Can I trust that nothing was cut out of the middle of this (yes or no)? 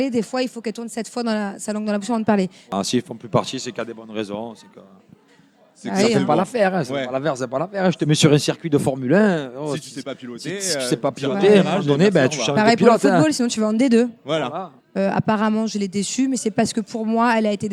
no